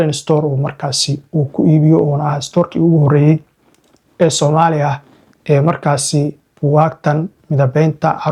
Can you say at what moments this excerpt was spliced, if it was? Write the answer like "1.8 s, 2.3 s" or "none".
none